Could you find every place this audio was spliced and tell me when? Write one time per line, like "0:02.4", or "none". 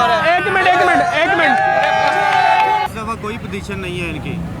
0:02.9